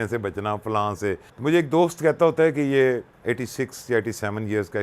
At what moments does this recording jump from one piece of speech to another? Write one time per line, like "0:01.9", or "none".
0:01.3
0:03.1